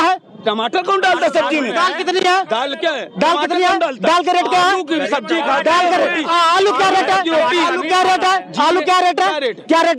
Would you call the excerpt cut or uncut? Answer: uncut